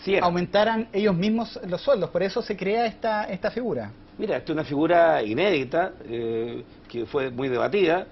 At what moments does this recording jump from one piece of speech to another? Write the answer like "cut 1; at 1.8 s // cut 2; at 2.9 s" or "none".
cut 1; at 3.2 s

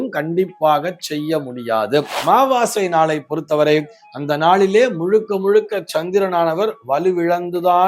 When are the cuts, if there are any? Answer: cut 1; at 2.2 s

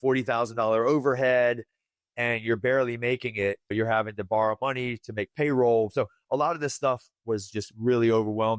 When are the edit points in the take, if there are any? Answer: none

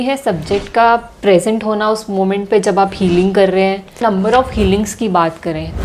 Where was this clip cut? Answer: cut 1; at 4.0 s

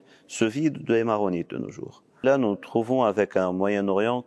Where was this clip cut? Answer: cut 1; at 2.2 s

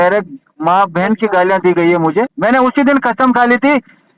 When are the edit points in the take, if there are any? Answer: cut 1; at 2.3 s

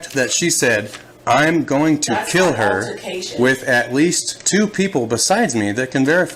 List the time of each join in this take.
none

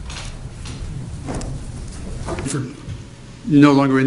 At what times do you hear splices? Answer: none

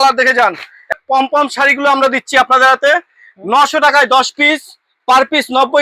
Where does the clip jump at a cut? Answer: cut 1; at 0.9 s

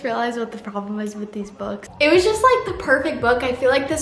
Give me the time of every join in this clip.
cut 1; at 1.9 s

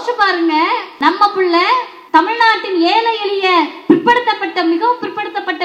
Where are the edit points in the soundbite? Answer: cut 1; at 0.9 s // cut 2; at 1.9 s

